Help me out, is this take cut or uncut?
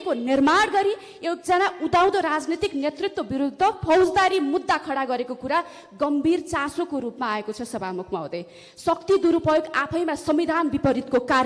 uncut